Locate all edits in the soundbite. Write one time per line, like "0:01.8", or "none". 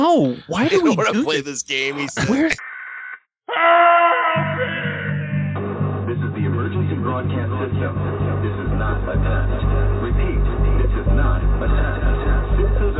0:02.6